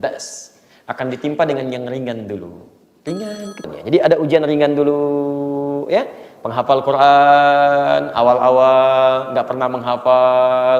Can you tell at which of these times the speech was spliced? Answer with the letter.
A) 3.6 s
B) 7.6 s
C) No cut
A